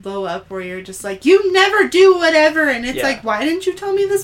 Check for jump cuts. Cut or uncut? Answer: uncut